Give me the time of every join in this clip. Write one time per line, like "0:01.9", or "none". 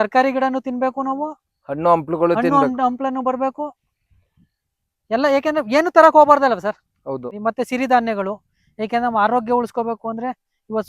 0:07.3